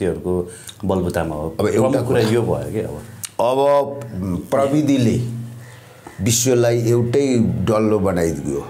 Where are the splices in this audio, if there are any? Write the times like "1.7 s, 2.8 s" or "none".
none